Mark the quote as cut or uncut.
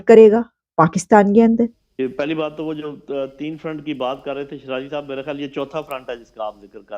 cut